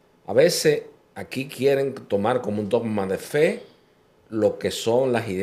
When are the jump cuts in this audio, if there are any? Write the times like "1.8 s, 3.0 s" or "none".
none